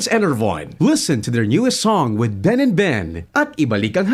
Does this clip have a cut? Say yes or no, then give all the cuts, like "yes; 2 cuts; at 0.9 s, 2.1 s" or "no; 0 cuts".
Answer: no; 0 cuts